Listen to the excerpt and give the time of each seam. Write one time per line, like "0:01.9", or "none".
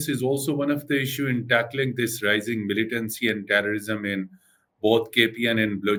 none